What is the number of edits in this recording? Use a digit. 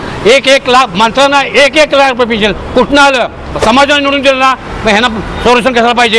1